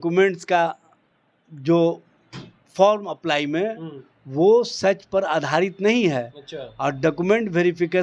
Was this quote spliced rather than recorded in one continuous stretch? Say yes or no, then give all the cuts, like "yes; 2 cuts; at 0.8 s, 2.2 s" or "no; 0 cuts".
no; 0 cuts